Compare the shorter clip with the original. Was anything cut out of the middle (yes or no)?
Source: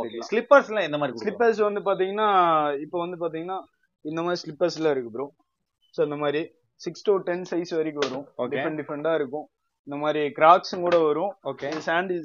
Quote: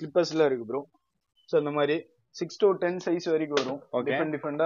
no